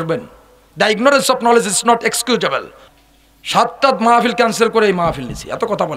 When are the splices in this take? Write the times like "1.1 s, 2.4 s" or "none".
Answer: 2.8 s